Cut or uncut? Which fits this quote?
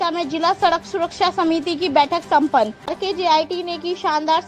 cut